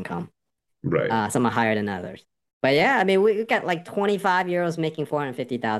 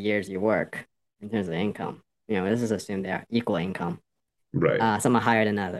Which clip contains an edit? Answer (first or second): second